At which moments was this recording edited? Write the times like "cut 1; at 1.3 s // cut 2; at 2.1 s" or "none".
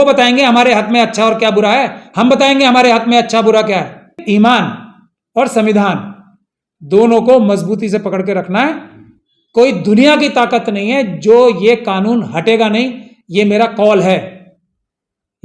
cut 1; at 4.2 s